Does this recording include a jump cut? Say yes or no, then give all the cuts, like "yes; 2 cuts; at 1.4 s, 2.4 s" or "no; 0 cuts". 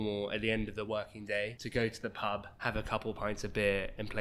yes; 2 cuts; at 1.6 s, 2.5 s